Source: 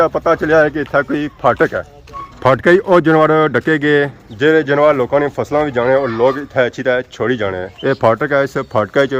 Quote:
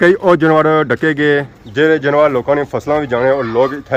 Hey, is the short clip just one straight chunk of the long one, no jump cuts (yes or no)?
yes